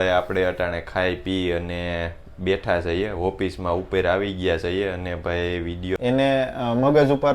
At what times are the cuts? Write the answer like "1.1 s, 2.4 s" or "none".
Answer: 6.0 s